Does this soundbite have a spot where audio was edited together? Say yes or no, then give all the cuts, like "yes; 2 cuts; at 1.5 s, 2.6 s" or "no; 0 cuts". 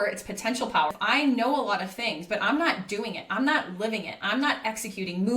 yes; 1 cut; at 0.9 s